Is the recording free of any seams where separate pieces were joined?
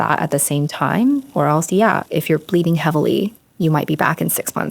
no; 1 cut; at 2.0 s

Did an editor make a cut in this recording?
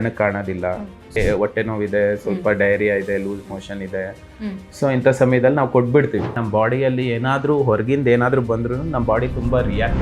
yes; 2 cuts; at 1.2 s, 6.4 s

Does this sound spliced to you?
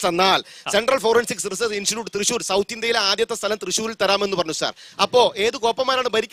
no; 0 cuts

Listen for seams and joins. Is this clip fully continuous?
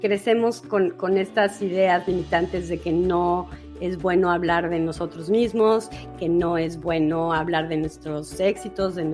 yes; 0 cuts

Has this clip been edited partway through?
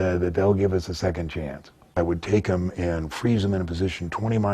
yes; 1 cut; at 1.8 s

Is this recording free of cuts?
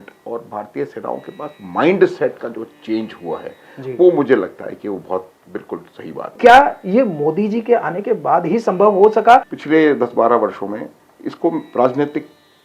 no; 2 cuts; at 6.3 s, 9.5 s

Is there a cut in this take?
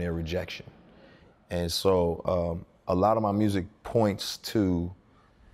no; 0 cuts

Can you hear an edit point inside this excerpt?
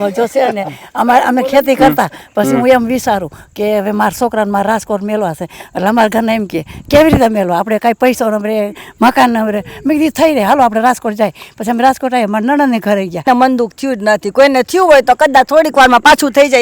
yes; 1 cut; at 13.3 s

